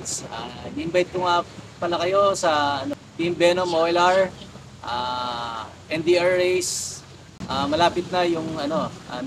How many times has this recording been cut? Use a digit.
1